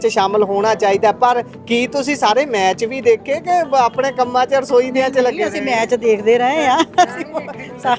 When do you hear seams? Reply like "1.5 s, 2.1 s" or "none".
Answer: none